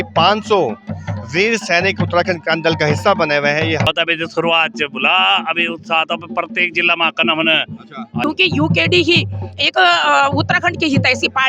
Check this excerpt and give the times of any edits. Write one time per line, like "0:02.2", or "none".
0:03.9
0:08.2